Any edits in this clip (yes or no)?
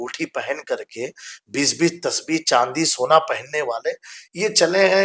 no